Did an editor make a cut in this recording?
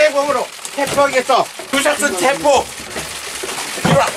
yes; 1 cut; at 1.7 s

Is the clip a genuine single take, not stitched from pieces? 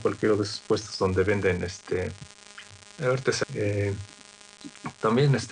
yes; 0 cuts

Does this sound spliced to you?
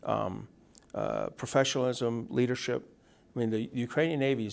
no; 0 cuts

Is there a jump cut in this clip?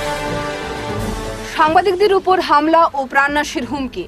no; 0 cuts

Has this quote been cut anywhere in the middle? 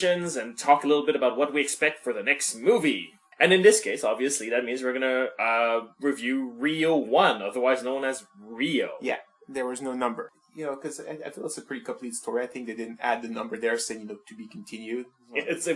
no; 0 cuts

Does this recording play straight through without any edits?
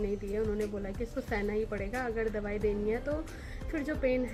yes; 0 cuts

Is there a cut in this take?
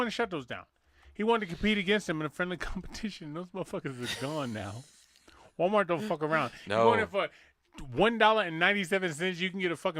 no; 0 cuts

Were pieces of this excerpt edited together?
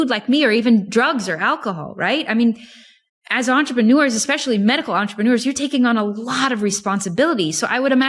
no; 0 cuts

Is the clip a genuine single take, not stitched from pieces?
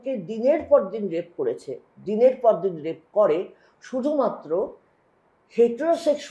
yes; 0 cuts

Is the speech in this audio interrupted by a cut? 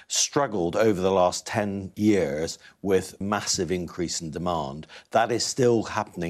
yes; 2 cuts; at 1.8 s, 3.2 s

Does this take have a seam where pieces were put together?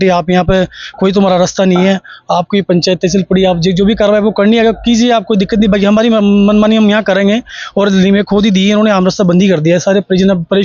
no; 0 cuts

